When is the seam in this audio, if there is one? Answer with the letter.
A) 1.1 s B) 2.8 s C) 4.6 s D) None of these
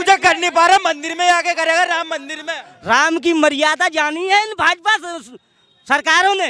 B